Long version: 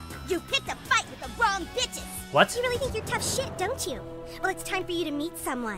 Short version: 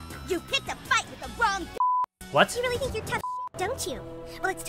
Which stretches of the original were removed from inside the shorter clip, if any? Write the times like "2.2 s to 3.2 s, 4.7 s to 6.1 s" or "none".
none